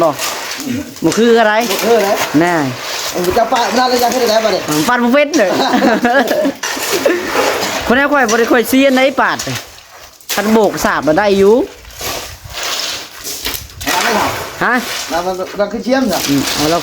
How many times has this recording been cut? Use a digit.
0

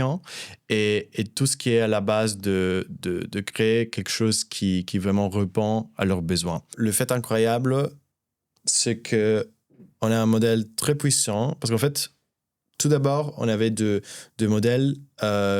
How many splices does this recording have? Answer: 1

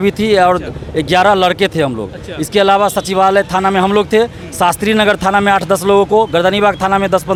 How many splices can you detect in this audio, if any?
0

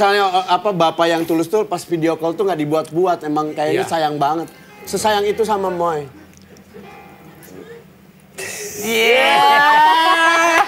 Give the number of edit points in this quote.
0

